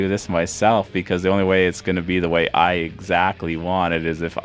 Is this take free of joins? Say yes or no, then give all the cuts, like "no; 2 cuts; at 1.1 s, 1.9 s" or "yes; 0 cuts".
yes; 0 cuts